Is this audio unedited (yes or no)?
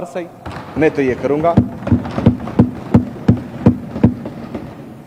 yes